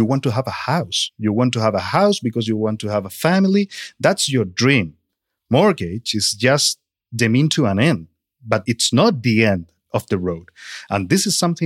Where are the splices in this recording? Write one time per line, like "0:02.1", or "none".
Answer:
0:01.2

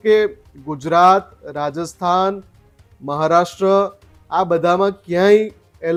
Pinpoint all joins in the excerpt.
none

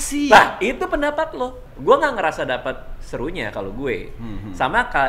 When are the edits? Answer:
0:01.6

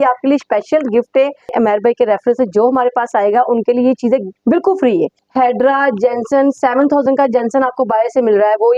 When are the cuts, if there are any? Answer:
0:01.5
0:04.3
0:05.2

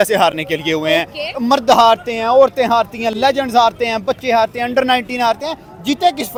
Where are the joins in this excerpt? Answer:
none

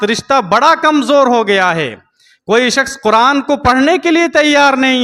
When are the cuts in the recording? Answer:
none

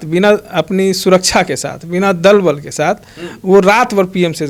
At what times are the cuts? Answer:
none

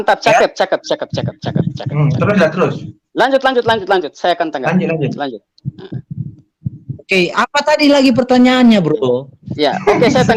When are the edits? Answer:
none

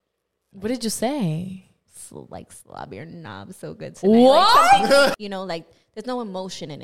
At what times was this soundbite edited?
0:05.1

